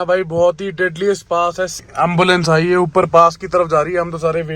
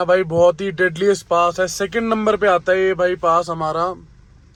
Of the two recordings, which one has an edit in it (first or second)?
first